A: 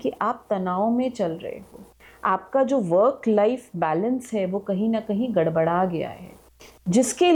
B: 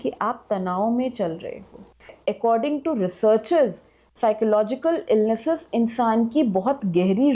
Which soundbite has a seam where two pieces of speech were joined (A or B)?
B